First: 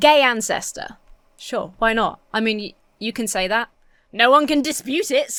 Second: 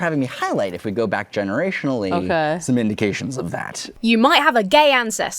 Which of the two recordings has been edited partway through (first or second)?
second